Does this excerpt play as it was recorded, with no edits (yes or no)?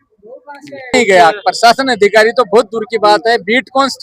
no